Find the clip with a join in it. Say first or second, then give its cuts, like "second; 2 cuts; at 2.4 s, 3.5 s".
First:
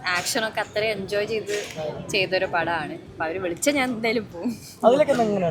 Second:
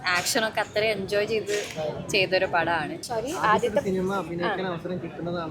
second; 1 cut; at 3.0 s